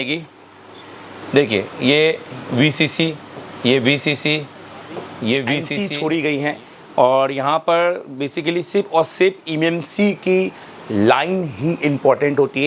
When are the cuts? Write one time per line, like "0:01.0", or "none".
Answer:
0:05.7